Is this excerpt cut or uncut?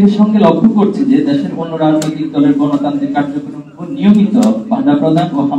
uncut